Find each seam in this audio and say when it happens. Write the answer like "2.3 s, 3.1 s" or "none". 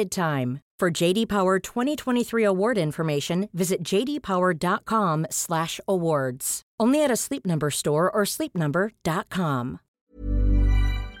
9.9 s